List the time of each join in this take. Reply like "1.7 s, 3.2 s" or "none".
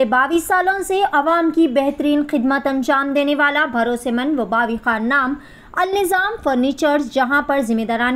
none